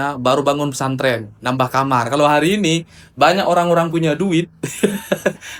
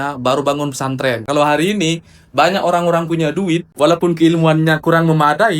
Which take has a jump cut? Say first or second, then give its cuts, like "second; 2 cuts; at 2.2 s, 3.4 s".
second; 2 cuts; at 1.2 s, 3.7 s